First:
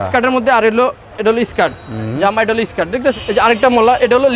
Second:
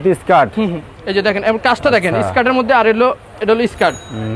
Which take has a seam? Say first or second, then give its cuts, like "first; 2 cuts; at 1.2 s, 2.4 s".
first; 1 cut; at 3.2 s